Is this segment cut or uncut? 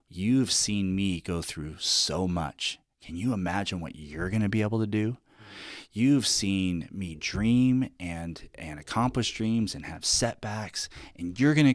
uncut